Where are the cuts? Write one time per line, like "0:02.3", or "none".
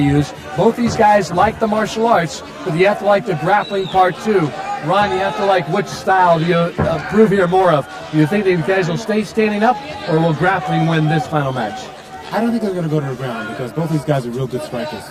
none